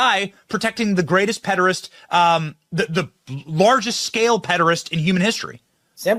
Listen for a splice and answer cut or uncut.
uncut